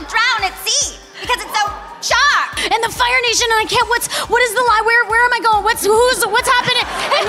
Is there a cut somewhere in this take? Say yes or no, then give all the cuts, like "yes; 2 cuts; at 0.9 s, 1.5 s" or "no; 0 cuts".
yes; 1 cut; at 2.6 s